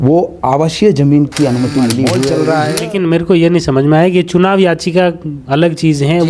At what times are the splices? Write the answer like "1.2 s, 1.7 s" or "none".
2.3 s